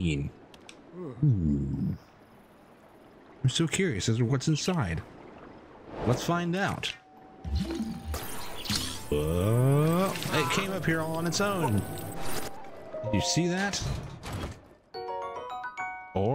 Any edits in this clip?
no; 0 cuts

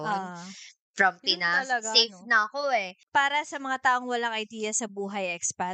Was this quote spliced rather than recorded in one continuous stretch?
yes; 1 cut; at 3.0 s

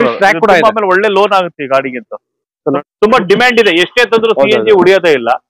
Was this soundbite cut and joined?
yes; 1 cut; at 2.8 s

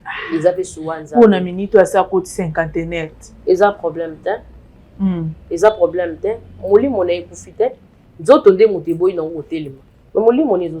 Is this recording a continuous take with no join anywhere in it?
yes; 0 cuts

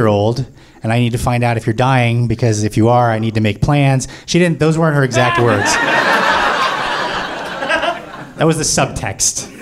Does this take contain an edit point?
no; 0 cuts

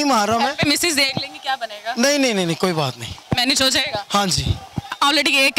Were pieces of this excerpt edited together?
no; 0 cuts

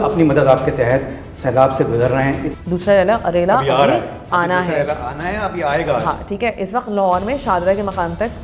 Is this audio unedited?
no; 1 cut; at 2.5 s

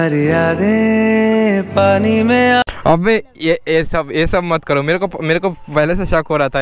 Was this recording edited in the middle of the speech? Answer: no; 0 cuts

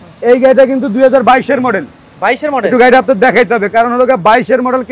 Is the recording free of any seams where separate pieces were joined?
yes; 0 cuts

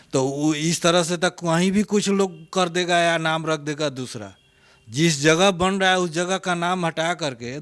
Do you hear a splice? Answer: no; 0 cuts

